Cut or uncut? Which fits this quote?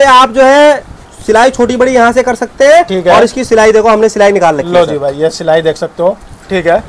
uncut